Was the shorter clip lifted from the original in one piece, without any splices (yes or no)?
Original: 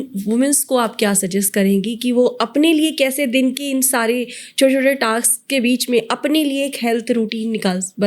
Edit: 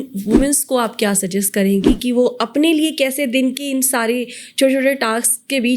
yes